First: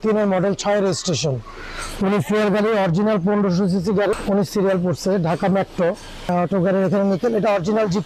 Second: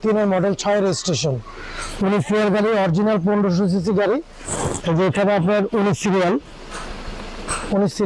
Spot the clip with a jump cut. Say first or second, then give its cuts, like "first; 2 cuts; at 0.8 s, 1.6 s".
first; 2 cuts; at 4.1 s, 6.3 s